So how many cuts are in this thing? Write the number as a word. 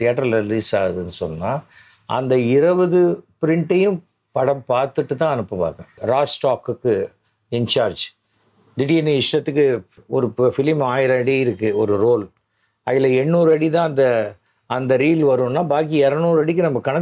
one